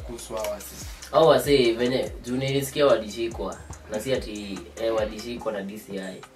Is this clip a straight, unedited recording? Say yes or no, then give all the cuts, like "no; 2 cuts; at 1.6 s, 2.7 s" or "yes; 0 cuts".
yes; 0 cuts